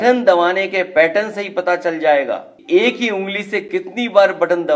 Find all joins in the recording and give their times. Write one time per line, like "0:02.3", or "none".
0:02.5